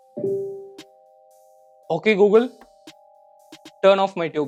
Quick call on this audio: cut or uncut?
uncut